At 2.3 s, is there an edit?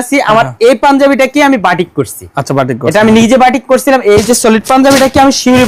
no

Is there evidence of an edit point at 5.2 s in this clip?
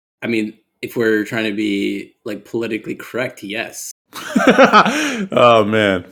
no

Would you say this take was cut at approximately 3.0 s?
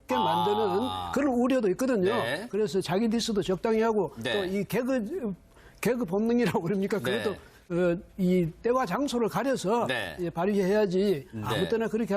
no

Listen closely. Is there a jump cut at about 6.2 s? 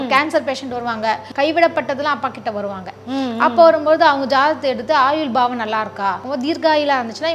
yes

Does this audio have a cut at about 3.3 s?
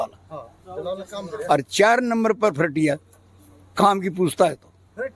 no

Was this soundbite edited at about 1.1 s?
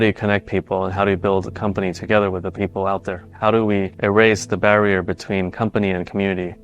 no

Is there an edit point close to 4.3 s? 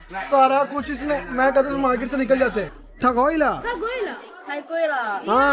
no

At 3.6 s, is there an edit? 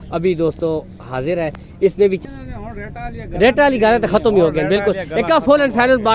no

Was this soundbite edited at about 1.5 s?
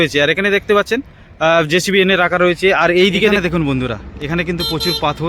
no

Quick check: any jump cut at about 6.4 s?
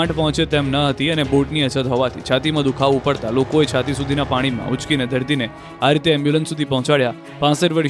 no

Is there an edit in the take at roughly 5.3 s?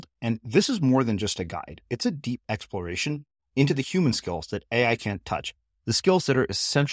no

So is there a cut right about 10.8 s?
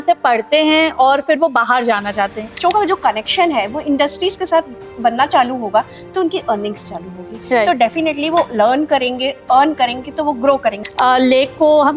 yes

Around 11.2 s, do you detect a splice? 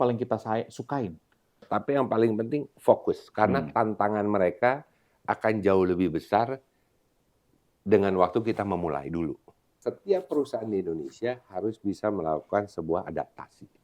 no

